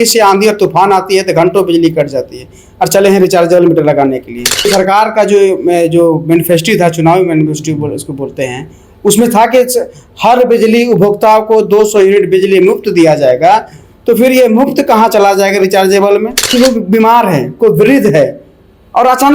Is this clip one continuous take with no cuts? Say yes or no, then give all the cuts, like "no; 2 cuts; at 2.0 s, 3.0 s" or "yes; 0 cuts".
no; 2 cuts; at 4.7 s, 16.5 s